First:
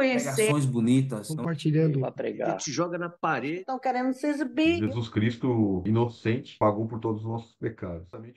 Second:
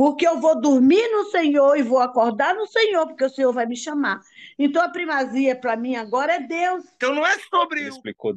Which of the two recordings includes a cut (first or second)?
second